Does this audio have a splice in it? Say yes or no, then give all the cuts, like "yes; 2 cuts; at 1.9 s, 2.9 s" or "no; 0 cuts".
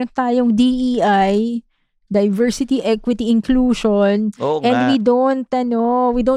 no; 0 cuts